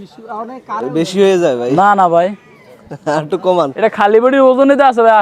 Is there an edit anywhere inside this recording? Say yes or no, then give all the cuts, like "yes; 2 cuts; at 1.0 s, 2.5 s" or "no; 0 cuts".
no; 0 cuts